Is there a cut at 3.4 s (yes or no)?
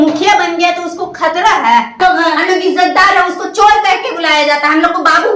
no